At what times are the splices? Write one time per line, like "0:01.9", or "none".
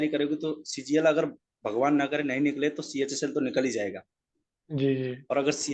none